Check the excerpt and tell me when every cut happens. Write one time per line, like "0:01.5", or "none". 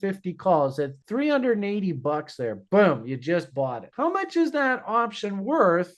0:01.0